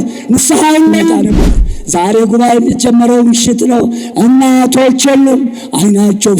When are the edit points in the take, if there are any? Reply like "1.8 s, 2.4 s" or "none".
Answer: 1.7 s